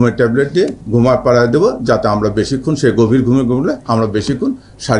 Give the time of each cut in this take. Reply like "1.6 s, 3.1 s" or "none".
none